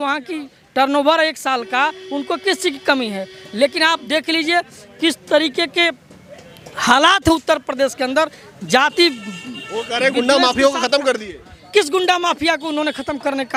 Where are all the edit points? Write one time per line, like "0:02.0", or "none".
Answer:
none